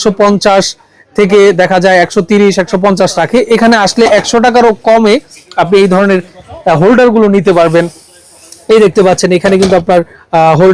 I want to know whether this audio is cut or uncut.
uncut